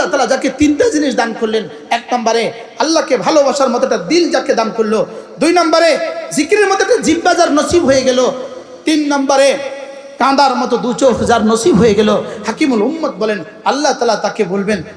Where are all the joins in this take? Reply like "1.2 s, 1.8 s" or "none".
none